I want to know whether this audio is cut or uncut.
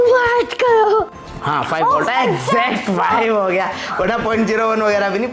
cut